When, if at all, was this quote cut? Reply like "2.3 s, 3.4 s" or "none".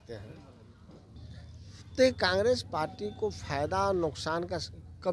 1.2 s